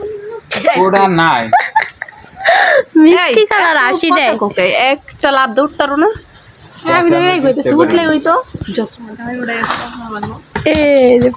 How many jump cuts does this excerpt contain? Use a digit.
1